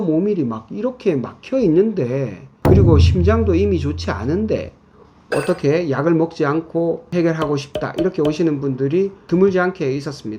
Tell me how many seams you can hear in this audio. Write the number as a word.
two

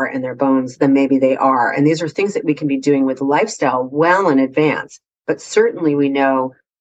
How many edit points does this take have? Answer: zero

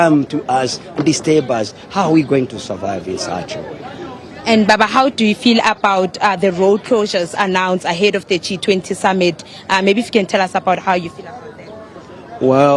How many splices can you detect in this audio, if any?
zero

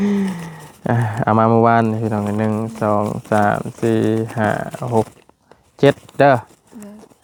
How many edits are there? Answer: zero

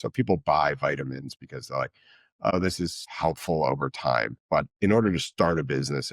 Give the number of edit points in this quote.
one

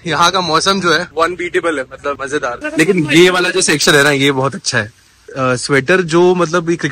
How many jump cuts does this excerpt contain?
two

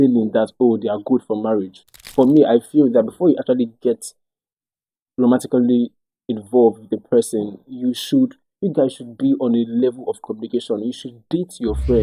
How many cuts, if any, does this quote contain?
one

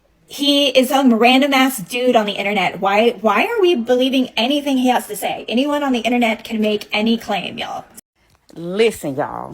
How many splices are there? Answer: one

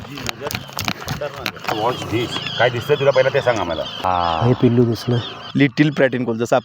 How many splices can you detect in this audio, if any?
three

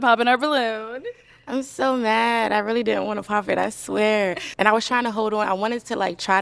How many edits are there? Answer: one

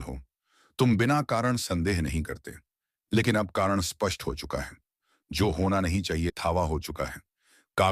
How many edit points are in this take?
one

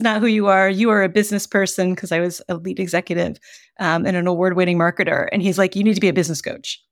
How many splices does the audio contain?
zero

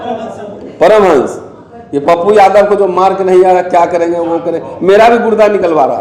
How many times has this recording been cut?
zero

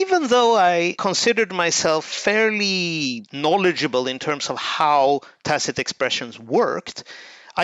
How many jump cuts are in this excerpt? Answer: two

